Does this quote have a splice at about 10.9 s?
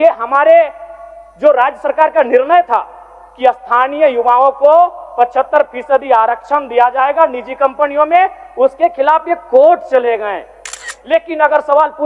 yes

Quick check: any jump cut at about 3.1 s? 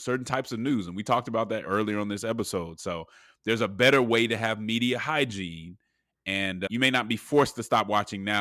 no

